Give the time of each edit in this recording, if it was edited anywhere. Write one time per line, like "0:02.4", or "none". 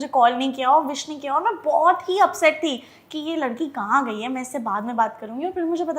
none